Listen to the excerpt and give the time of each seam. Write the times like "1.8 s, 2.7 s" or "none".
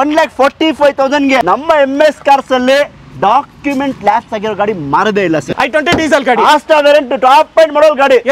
1.4 s, 5.5 s